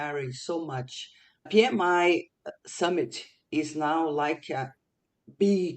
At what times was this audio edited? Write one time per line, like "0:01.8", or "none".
0:01.5
0:02.5